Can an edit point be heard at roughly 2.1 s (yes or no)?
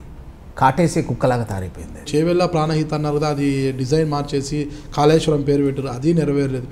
yes